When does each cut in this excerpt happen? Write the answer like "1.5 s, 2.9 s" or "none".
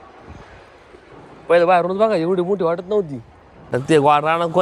3.7 s